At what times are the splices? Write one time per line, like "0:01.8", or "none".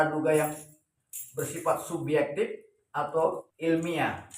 0:03.5